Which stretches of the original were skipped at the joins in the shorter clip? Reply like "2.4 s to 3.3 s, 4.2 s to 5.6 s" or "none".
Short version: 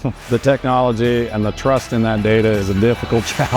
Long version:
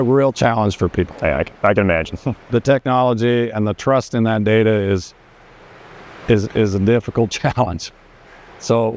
4.9 s to 6.7 s